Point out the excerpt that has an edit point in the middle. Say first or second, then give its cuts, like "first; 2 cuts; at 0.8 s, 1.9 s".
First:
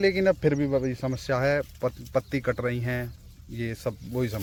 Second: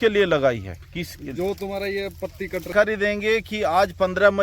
second; 1 cut; at 2.7 s